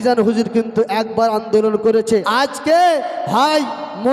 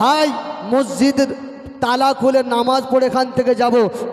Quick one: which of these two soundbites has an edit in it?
first; 1 cut; at 2.3 s

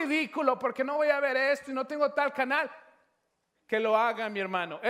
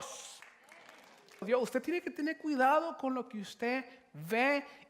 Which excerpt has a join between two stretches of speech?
second; 1 cut; at 1.4 s

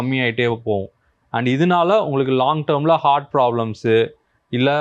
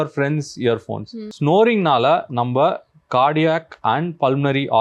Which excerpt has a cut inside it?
second; 1 cut; at 1.3 s

